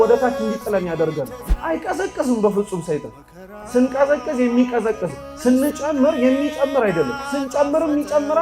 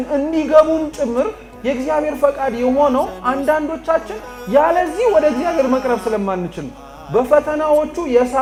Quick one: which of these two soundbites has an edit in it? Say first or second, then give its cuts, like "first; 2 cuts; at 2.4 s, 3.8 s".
first; 1 cut; at 1.4 s